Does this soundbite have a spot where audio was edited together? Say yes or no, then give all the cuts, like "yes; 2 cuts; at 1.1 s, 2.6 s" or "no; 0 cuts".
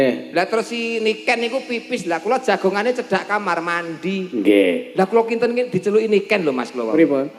no; 0 cuts